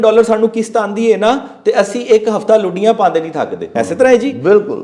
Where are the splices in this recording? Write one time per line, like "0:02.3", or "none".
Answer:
0:03.6

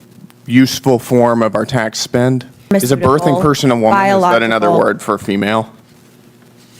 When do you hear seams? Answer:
0:02.7

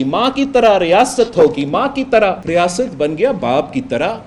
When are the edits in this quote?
0:02.4

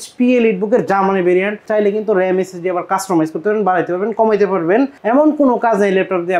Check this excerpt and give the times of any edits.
0:01.6
0:05.0

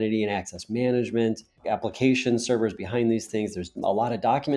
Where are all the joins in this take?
0:01.6

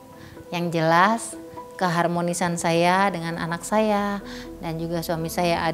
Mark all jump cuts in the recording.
none

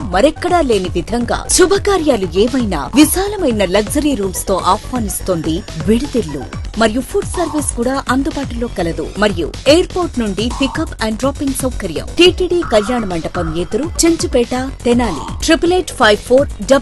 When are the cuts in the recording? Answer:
none

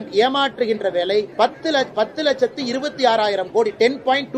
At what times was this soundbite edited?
0:01.3

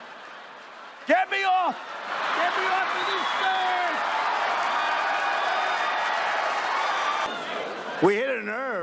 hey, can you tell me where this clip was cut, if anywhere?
0:07.3

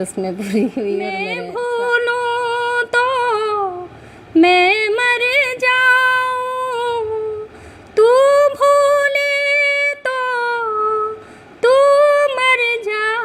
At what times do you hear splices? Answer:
0:01.3

